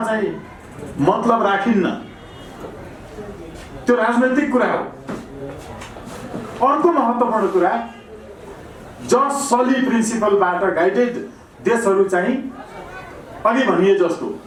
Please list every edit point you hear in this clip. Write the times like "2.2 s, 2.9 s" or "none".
none